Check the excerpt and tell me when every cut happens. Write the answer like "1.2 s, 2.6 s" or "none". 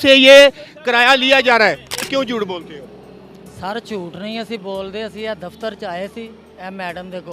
2.1 s

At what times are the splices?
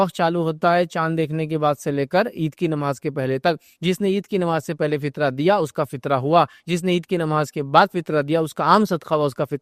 none

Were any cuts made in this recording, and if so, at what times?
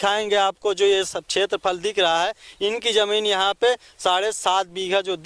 none

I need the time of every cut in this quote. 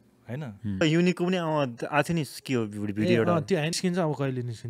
0.8 s, 3.8 s

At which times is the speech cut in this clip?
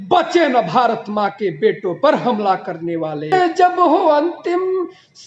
3.3 s

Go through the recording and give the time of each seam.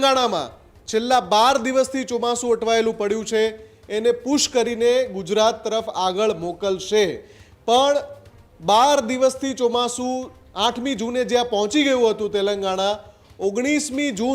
none

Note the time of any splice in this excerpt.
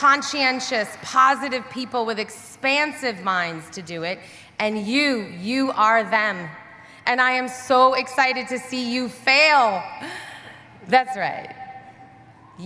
none

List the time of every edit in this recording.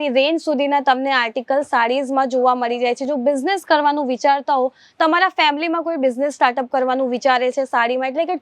none

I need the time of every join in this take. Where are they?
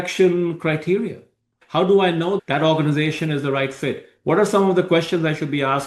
2.4 s

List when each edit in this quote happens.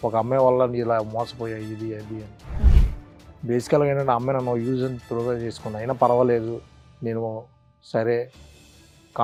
none

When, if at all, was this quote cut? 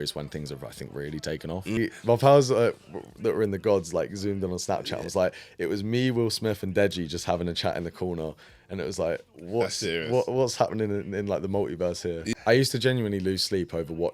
1.8 s, 12.3 s

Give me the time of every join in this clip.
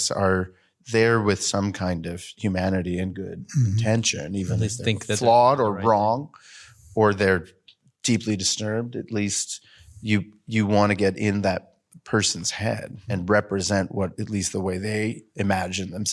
13.1 s

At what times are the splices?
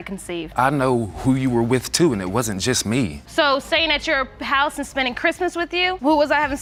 none

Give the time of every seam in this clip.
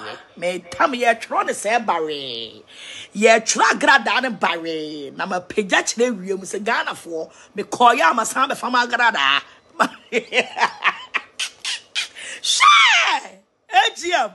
none

